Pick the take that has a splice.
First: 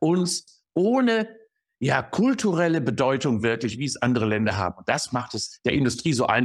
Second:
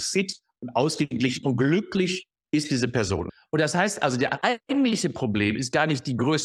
second; 2 cuts; at 3.3 s, 4.4 s

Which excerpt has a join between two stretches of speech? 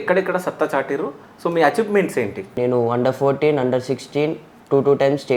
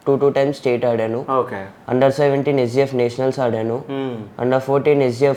first; 1 cut; at 2.6 s

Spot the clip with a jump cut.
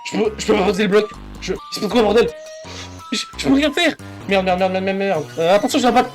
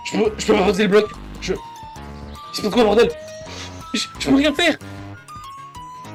first; 2 cuts; at 1.7 s, 4.1 s

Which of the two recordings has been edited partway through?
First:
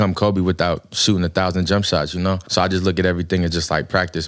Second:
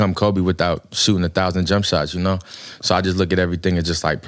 first; 1 cut; at 2.4 s

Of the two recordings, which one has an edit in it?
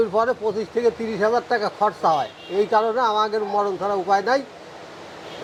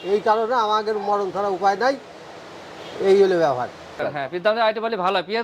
second; 1 cut; at 4.0 s

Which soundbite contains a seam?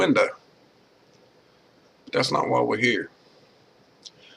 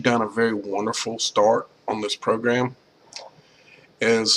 first; 1 cut; at 2.9 s

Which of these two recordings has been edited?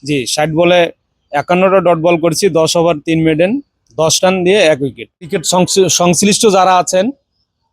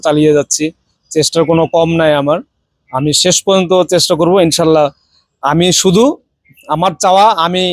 first; 1 cut; at 5.4 s

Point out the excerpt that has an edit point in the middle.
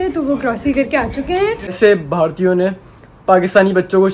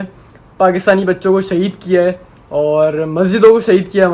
first; 1 cut; at 1.7 s

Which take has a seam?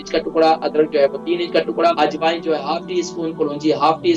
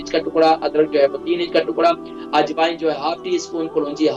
first; 1 cut; at 2.0 s

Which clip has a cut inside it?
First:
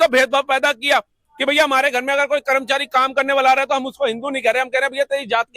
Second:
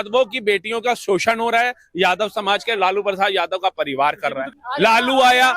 second; 1 cut; at 4.5 s

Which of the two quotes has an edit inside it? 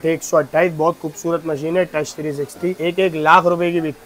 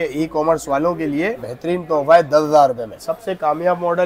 second; 2 cuts; at 1.4 s, 3.0 s

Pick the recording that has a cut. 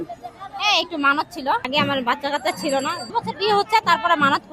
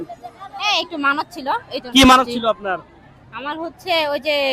first; 2 cuts; at 1.7 s, 3.0 s

